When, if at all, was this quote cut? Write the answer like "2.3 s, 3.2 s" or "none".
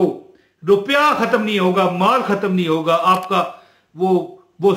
none